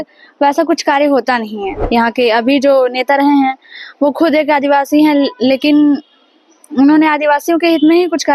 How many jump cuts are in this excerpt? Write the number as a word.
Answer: one